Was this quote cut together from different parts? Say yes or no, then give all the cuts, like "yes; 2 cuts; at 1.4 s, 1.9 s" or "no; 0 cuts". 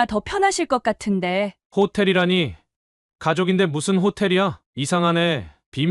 yes; 1 cut; at 4.6 s